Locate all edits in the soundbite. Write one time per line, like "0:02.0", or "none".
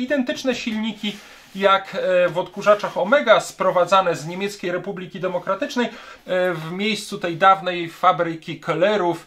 0:06.1

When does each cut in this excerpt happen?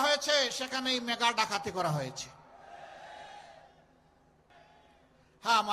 0:04.5

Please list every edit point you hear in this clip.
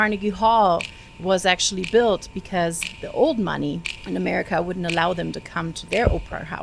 0:03.9

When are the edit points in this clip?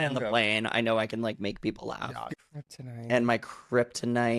0:02.3

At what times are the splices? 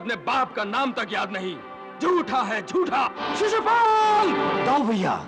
0:03.2

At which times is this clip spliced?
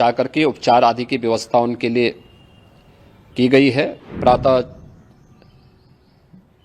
0:04.0

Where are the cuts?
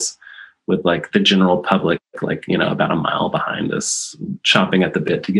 0:01.1
0:04.4

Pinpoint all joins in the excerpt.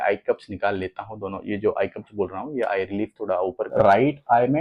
0:03.7

